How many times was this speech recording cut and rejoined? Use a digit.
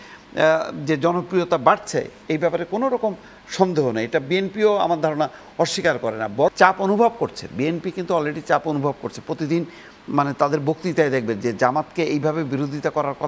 1